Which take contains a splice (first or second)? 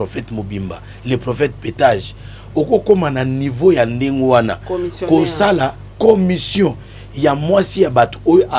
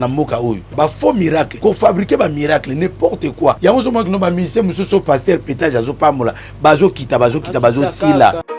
second